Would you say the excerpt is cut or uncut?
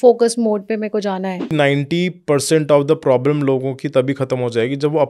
cut